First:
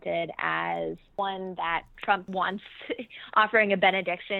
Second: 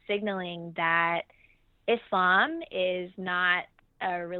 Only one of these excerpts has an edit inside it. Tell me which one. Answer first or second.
first